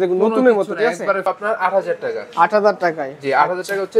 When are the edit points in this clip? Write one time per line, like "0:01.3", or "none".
0:01.2